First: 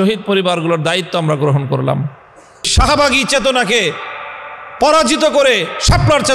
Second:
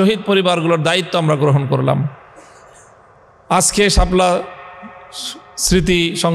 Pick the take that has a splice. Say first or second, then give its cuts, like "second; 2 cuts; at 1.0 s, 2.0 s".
first; 1 cut; at 2.7 s